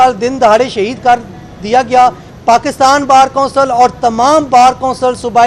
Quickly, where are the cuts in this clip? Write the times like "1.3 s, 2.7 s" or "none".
2.3 s

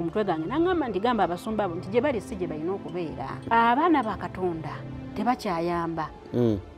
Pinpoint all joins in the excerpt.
3.4 s

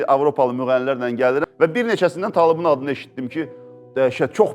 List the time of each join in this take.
1.5 s

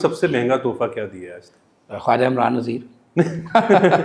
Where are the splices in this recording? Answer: none

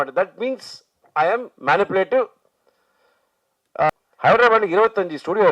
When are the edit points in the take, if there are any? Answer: 3.9 s

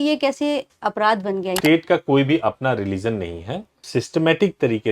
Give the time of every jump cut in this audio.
1.5 s, 3.8 s

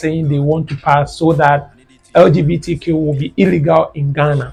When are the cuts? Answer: none

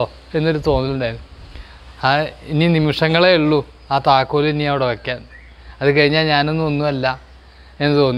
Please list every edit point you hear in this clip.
none

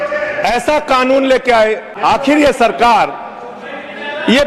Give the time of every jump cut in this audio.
1.9 s

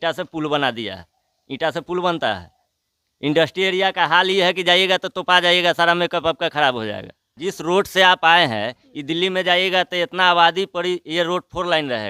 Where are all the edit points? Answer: 7.2 s

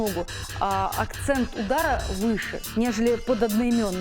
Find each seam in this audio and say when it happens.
2.6 s

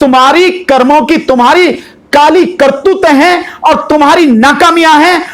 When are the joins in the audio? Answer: none

